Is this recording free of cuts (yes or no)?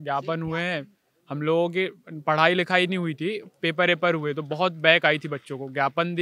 yes